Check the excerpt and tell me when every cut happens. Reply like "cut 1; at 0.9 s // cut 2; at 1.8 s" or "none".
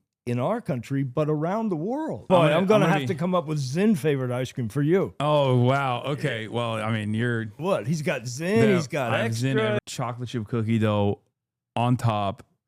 cut 1; at 2.2 s // cut 2; at 9.8 s